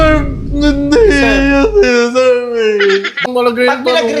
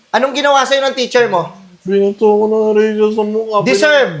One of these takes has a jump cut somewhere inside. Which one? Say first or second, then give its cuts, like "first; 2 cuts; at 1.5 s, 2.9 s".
first; 1 cut; at 3.3 s